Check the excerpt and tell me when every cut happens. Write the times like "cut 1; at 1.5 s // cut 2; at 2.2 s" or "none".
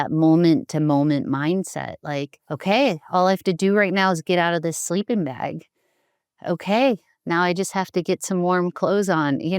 cut 1; at 2.4 s